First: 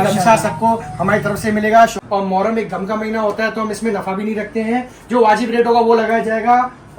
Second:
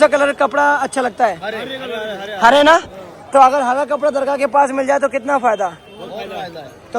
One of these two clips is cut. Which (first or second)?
first